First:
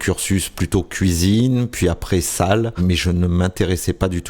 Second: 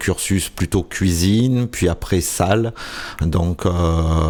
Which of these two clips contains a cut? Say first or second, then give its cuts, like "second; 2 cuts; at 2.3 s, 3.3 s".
first; 1 cut; at 2.8 s